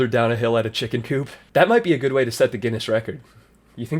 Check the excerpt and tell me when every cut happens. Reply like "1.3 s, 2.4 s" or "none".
1.4 s